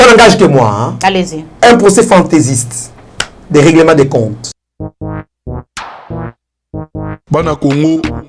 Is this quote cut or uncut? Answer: cut